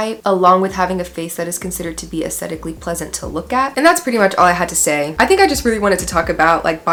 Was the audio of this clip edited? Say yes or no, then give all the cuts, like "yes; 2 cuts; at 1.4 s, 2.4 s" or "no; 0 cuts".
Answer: no; 0 cuts